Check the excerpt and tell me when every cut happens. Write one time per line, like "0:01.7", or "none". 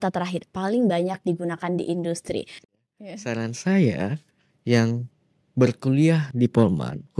0:02.7